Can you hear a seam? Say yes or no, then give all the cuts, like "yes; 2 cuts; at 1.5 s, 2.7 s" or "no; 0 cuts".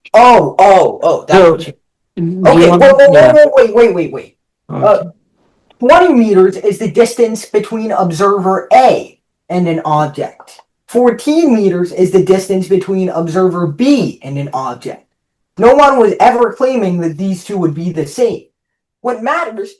no; 0 cuts